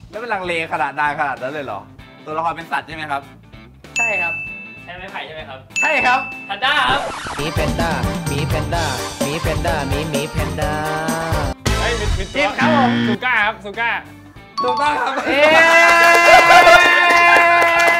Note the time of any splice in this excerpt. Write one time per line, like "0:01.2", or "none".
none